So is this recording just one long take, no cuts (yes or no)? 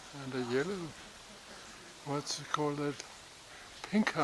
yes